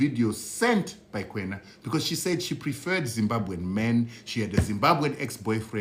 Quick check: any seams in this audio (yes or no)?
no